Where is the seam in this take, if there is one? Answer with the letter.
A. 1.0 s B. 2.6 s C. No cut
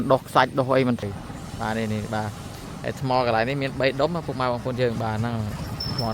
A